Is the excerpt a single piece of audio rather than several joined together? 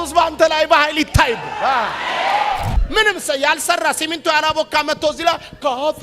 no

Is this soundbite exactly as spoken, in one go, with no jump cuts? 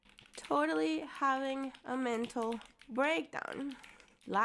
no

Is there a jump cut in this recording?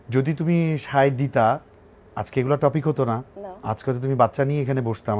no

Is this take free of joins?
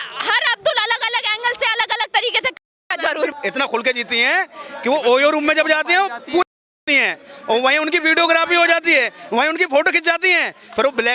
no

